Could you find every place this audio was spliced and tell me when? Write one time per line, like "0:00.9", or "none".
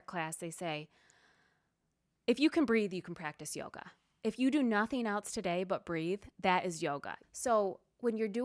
0:07.1